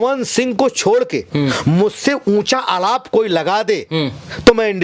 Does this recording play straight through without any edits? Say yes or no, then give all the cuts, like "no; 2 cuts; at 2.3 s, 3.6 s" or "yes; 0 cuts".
yes; 0 cuts